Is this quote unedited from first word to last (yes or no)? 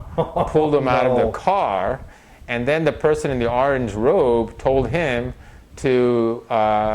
yes